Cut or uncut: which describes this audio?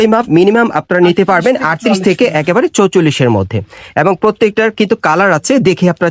uncut